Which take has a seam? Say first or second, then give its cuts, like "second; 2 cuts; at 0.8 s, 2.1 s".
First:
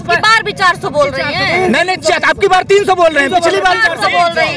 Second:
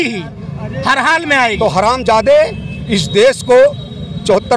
second; 1 cut; at 1.6 s